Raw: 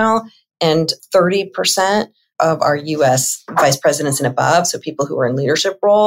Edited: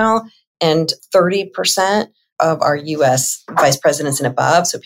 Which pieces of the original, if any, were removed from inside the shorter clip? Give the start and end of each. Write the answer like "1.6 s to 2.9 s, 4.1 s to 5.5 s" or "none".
none